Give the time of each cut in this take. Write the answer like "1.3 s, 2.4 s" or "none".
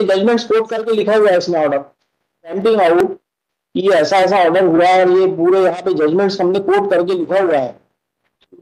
2.6 s